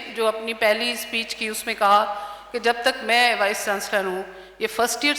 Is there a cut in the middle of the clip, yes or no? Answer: no